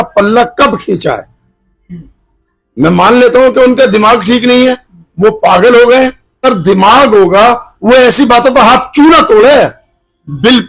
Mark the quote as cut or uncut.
cut